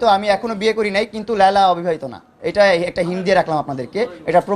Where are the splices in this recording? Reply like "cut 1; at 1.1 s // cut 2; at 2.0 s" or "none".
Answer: none

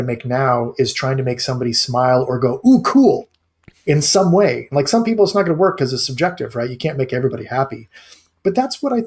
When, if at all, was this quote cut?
none

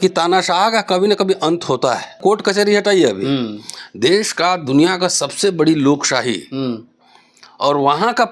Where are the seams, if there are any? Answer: cut 1; at 2.2 s

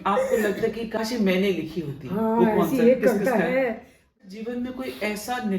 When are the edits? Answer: cut 1; at 1.0 s // cut 2; at 4.2 s

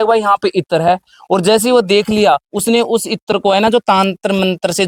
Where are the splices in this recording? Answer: none

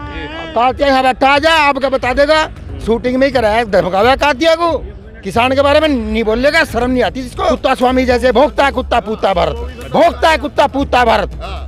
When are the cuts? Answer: cut 1; at 7.3 s

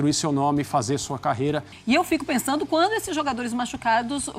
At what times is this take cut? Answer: cut 1; at 1.7 s

